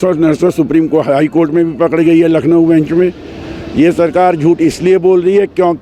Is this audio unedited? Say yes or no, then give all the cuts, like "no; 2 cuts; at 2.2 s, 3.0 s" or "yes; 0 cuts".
yes; 0 cuts